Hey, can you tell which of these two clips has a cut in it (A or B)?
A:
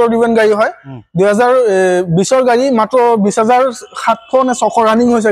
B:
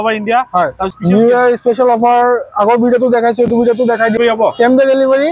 B